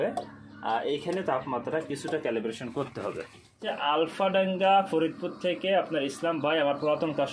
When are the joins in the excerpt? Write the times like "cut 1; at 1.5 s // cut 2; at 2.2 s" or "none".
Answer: cut 1; at 3.6 s